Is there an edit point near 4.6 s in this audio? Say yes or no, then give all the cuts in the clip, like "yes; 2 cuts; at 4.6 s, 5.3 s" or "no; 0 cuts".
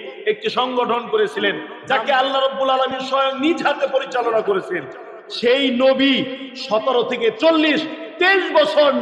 no; 2 cuts; at 1.7 s, 7.4 s